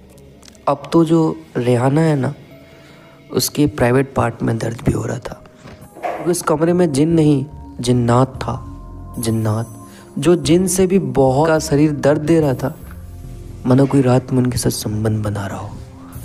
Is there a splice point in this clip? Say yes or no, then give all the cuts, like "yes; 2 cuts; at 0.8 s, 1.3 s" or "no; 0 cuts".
yes; 2 cuts; at 6.3 s, 11.5 s